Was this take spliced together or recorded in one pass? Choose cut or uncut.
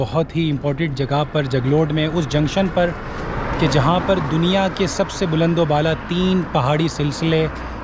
uncut